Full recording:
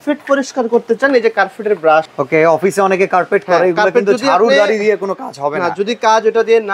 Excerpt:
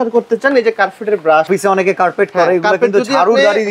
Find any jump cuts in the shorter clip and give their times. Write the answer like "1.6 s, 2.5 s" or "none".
1.5 s

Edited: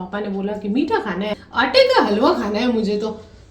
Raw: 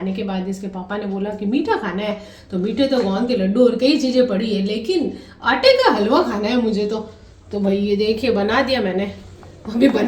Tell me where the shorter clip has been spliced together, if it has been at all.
1.4 s

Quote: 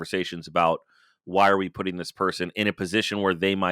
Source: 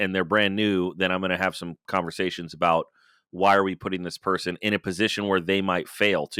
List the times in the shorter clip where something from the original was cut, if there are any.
none

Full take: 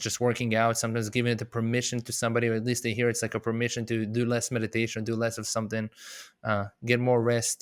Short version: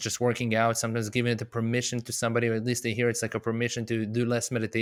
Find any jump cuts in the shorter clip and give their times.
none

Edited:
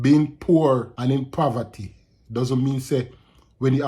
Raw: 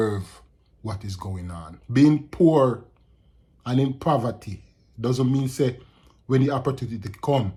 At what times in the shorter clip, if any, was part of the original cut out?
0.9 s

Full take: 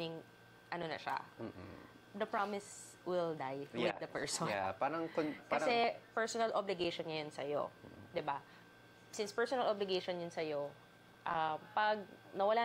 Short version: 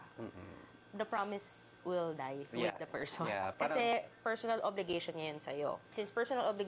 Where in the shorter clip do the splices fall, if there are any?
3.5 s, 5.9 s

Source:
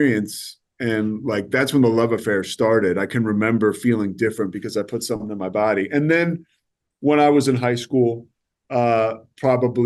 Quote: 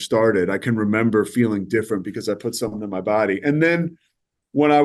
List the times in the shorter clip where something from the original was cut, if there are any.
none

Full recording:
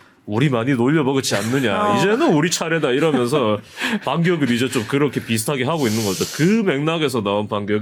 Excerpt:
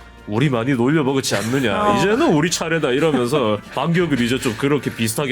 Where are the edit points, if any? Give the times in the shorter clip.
3.7 s

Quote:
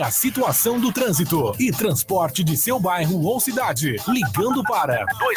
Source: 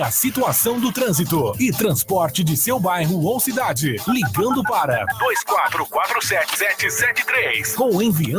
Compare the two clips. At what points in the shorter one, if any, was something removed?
none

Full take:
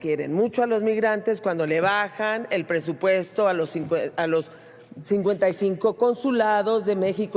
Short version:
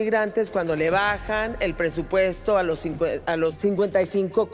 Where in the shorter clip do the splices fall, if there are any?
3.6 s

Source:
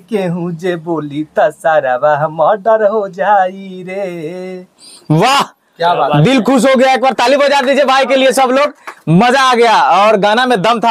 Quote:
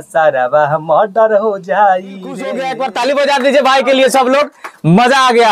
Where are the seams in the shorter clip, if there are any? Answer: 2.5 s

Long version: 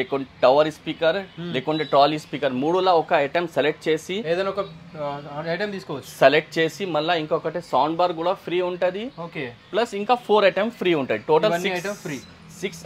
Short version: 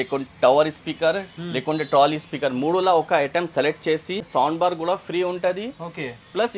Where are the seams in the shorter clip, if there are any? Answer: 4.2 s

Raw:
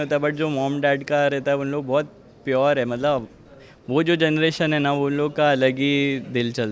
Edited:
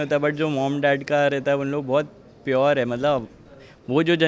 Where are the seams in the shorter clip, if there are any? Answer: none

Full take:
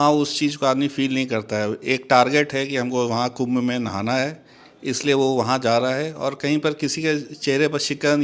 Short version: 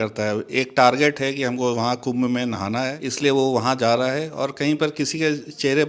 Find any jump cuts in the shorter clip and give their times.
3.0 s

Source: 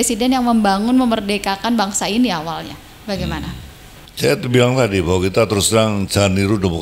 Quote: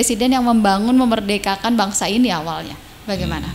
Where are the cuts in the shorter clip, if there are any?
none

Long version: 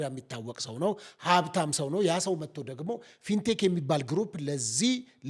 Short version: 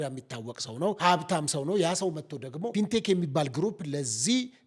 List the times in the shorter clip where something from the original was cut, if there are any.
1.0 s, 2.6 s

